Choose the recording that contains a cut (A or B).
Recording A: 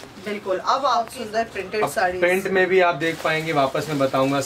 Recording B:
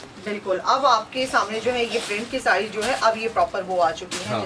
A